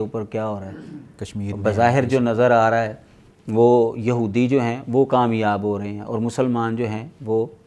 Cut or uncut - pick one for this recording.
uncut